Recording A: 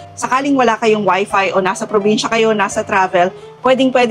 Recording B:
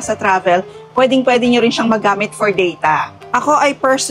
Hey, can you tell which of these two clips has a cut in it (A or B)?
B